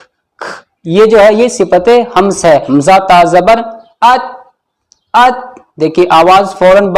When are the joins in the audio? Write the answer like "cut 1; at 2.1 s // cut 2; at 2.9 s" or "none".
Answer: cut 1; at 2.6 s